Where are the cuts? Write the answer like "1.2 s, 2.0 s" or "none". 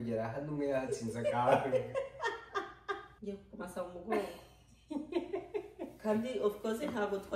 3.1 s